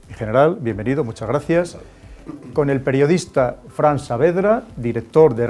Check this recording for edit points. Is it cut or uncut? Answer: cut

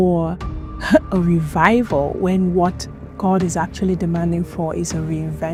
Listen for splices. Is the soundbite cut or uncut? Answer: uncut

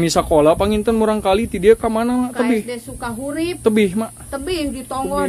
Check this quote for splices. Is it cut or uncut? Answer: uncut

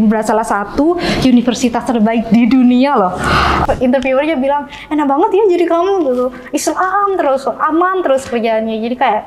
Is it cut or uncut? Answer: cut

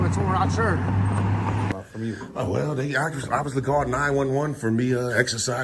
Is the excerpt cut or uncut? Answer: cut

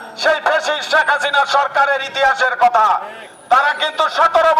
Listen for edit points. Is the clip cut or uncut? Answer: uncut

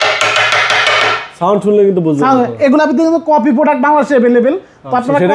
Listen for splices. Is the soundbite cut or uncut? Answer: uncut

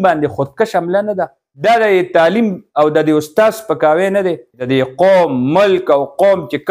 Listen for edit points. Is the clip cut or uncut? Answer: cut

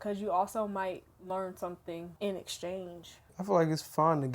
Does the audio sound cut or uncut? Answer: cut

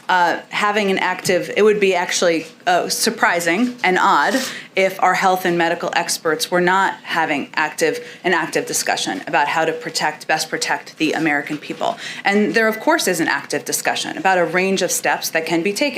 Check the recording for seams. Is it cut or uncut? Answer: uncut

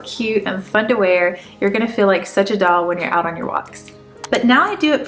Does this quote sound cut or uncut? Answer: cut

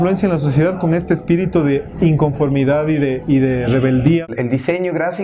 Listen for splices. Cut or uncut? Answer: cut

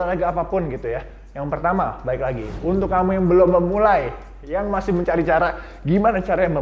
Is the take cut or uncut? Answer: uncut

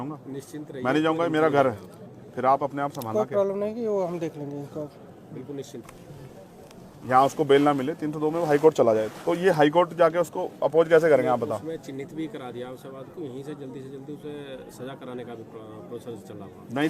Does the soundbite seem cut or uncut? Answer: cut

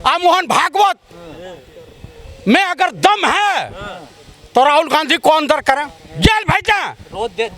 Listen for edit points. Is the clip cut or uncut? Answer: uncut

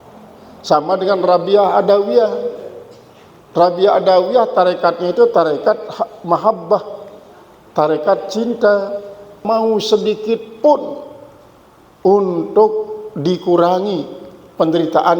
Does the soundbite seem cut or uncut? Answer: cut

